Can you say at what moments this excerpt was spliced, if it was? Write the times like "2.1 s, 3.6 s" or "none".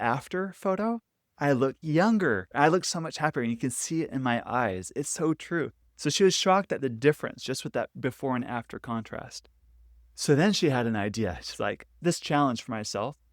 2.5 s